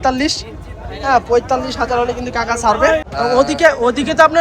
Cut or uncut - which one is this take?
cut